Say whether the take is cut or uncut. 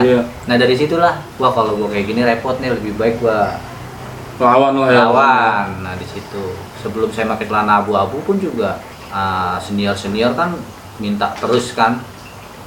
cut